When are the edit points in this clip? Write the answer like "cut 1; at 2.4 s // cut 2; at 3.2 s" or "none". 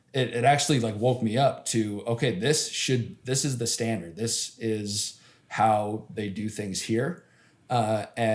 none